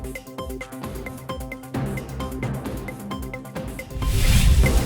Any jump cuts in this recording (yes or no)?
yes